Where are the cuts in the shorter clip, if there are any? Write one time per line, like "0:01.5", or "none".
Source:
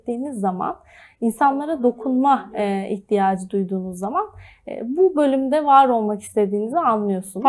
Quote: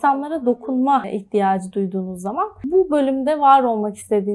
0:01.1
0:02.6